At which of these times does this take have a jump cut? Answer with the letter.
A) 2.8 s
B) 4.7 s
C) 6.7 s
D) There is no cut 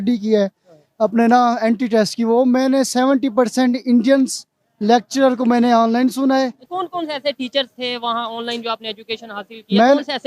C